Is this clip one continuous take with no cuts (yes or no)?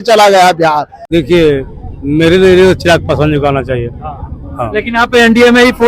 no